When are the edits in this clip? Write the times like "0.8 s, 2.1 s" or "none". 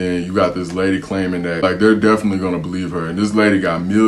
1.6 s